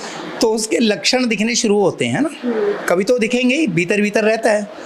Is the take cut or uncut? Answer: uncut